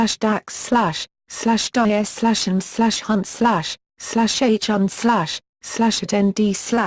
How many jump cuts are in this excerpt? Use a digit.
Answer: 1